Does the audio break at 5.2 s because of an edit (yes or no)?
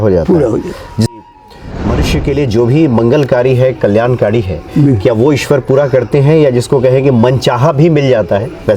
no